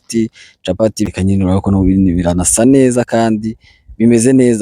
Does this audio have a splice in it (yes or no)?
yes